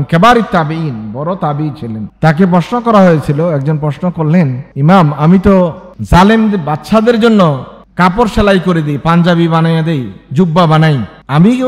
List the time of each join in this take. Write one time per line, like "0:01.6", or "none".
0:04.6